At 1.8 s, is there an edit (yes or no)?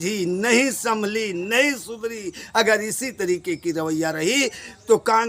no